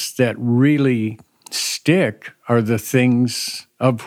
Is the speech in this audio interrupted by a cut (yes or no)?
no